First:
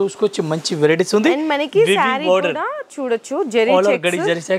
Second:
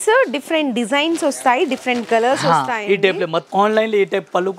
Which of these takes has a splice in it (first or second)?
second